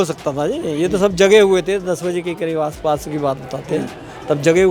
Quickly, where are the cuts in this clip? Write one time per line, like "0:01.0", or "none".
none